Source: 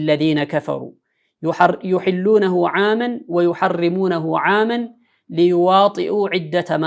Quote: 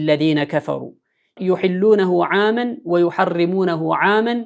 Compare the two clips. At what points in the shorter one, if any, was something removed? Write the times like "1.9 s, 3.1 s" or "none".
1.4 s